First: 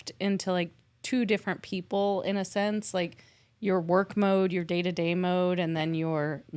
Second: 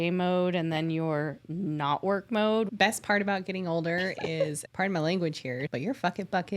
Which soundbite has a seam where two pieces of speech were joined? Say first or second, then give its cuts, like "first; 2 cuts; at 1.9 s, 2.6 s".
second; 3 cuts; at 2.7 s, 4.6 s, 5.7 s